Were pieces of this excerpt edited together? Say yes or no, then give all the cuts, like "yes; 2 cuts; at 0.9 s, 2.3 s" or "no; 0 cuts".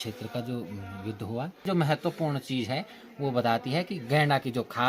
yes; 1 cut; at 1.6 s